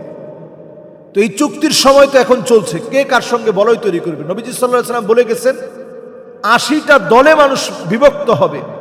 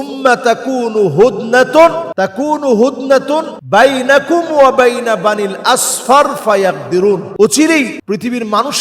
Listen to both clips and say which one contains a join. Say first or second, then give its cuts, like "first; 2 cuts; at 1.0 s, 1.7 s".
second; 4 cuts; at 2.1 s, 3.5 s, 7.3 s, 8.0 s